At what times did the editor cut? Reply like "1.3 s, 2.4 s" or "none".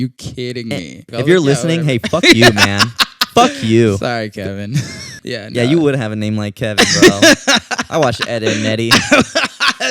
1.0 s, 5.2 s